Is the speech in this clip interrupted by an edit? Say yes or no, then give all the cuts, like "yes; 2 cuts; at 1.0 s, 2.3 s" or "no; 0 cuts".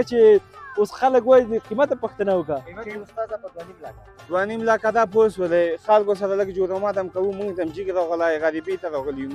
no; 0 cuts